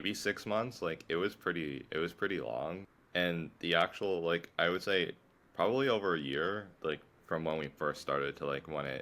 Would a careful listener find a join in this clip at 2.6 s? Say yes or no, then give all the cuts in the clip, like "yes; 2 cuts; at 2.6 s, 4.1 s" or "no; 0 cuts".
no; 0 cuts